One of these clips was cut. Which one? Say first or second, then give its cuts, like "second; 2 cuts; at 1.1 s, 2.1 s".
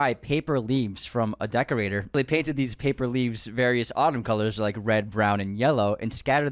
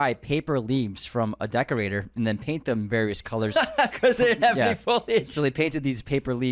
first; 1 cut; at 2.1 s